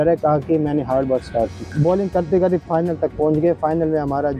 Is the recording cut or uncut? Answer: cut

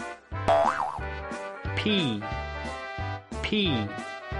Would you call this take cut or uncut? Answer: cut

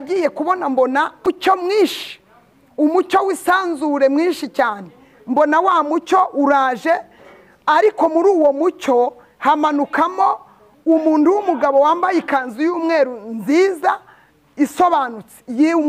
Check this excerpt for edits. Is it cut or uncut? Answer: cut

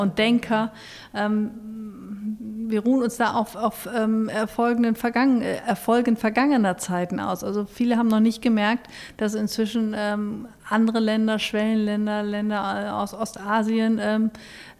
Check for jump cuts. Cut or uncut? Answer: uncut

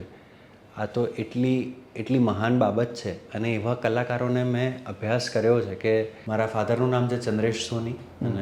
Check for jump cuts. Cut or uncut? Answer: cut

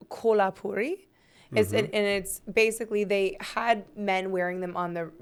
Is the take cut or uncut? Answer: uncut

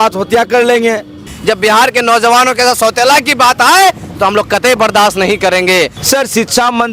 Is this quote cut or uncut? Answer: cut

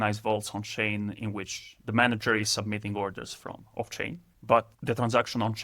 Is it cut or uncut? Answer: cut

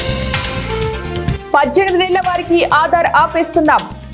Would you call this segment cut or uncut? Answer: cut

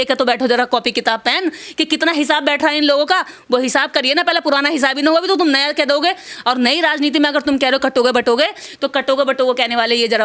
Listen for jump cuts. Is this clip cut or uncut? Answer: uncut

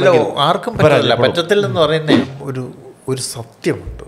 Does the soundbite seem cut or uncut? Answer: cut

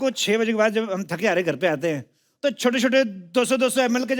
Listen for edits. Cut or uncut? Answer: uncut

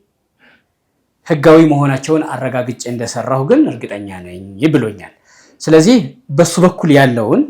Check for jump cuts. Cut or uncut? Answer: uncut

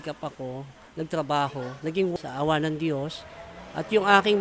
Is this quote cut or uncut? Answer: cut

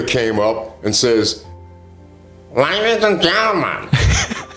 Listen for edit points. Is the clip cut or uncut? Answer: uncut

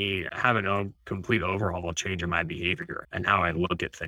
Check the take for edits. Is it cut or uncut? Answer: cut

